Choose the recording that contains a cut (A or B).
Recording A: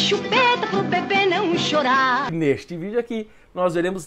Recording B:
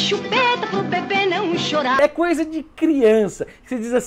A